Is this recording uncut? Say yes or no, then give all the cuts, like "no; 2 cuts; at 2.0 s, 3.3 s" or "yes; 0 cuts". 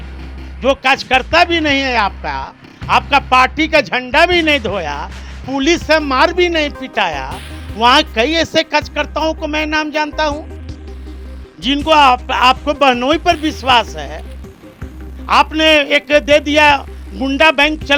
yes; 0 cuts